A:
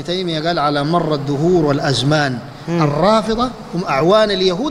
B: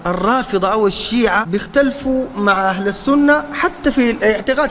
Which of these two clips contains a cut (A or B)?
B